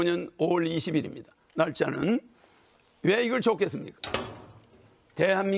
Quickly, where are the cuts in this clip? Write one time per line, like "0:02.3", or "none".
none